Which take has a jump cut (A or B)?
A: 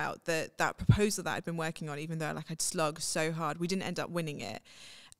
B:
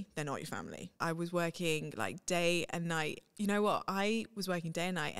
B